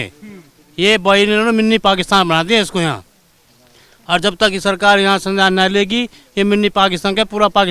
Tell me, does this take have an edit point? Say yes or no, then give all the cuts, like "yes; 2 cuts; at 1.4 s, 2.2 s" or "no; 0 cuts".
no; 0 cuts